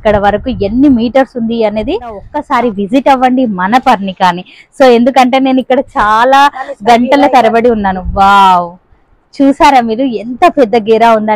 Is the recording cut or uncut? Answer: cut